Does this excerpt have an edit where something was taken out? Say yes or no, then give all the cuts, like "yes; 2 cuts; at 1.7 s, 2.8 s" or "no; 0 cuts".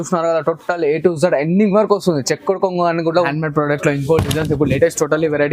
yes; 1 cut; at 3.3 s